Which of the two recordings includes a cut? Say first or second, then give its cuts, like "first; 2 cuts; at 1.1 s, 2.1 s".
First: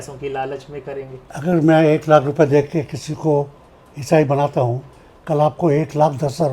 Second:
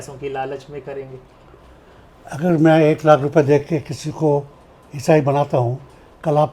first; 1 cut; at 1.2 s